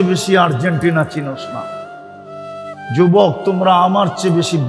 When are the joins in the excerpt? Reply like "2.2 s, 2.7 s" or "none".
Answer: 1.4 s, 3.0 s